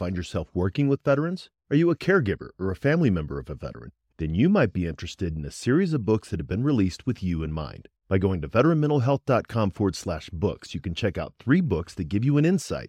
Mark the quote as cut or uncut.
uncut